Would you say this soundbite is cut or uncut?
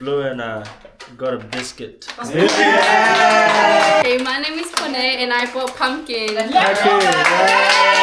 cut